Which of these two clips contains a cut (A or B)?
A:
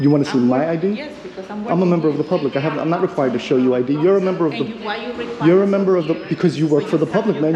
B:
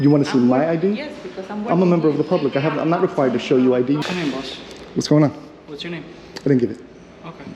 B